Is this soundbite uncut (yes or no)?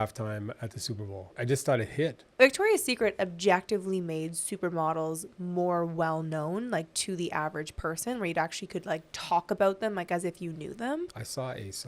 no